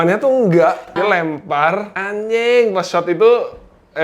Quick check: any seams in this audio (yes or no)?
yes